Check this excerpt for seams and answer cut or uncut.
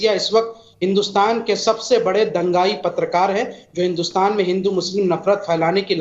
uncut